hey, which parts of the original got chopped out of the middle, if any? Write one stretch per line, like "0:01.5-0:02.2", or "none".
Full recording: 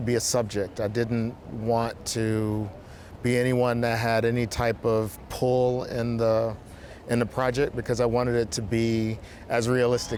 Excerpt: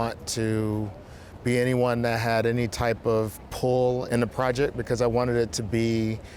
0:05.8-0:07.0